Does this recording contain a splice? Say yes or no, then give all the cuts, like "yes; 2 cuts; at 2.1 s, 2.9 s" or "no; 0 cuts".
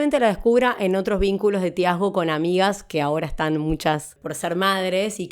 yes; 1 cut; at 4.2 s